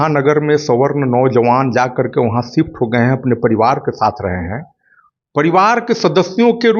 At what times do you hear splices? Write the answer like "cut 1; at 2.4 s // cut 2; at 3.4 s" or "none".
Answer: none